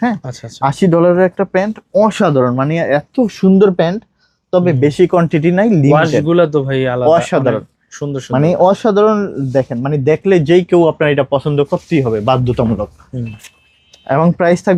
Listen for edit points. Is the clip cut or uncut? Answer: uncut